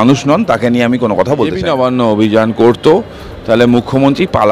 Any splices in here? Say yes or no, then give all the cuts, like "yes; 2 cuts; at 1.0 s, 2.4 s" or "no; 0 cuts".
yes; 1 cut; at 1.7 s